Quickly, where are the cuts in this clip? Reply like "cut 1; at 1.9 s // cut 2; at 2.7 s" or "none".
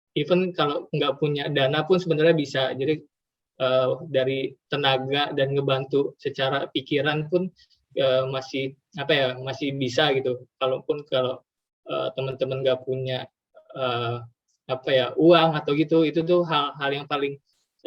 none